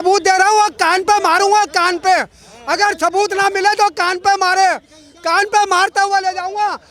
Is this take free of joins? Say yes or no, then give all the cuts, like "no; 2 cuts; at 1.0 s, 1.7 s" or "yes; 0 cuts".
yes; 0 cuts